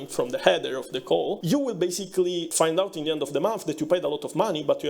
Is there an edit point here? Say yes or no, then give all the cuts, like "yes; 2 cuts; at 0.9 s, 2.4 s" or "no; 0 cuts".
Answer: yes; 2 cuts; at 1.4 s, 2.5 s